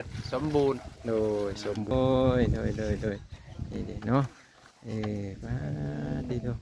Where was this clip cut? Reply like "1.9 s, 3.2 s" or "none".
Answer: 1.9 s